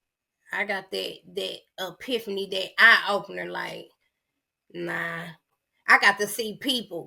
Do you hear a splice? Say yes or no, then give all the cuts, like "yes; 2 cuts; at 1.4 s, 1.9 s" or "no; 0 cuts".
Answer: yes; 1 cut; at 5.4 s